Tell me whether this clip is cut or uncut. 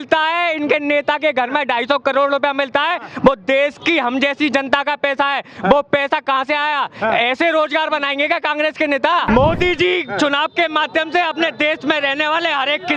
cut